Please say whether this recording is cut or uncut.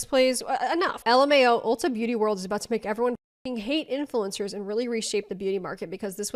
uncut